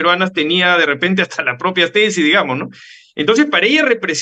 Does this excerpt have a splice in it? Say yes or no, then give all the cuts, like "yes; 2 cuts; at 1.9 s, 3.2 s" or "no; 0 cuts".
no; 0 cuts